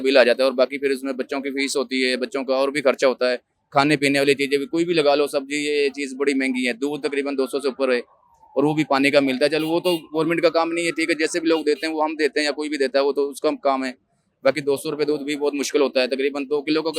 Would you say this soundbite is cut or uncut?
uncut